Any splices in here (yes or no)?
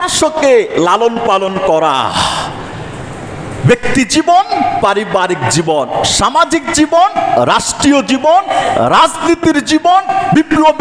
no